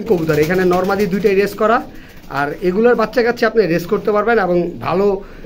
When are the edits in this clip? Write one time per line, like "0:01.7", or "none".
none